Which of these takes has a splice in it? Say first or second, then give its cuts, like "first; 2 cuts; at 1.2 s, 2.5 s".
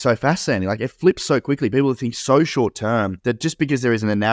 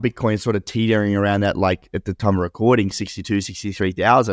first; 1 cut; at 3.1 s